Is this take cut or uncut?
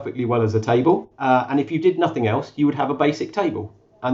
cut